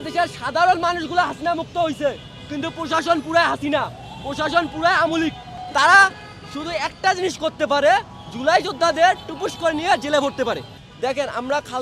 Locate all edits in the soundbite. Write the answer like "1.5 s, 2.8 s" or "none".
5.5 s, 10.8 s